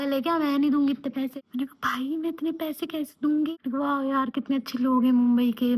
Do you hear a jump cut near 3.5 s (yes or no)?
yes